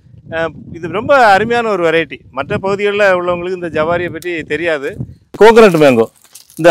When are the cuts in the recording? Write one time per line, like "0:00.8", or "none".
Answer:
0:05.4